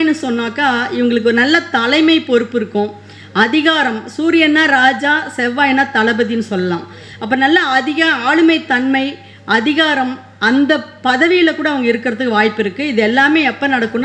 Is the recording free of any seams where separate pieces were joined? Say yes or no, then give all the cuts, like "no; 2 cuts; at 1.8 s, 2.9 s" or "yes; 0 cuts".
yes; 0 cuts